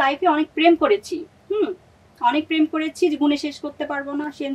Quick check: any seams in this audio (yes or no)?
no